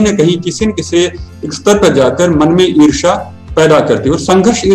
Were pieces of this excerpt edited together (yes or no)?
no